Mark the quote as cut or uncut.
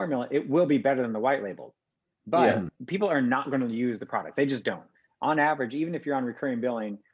cut